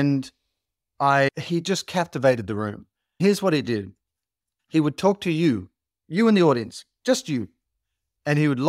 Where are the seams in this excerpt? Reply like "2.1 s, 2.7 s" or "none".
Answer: 1.3 s, 3.2 s